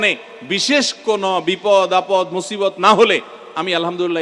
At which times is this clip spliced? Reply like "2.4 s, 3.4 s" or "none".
none